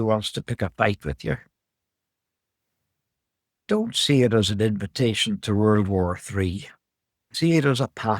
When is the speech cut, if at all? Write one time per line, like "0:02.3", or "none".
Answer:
0:07.2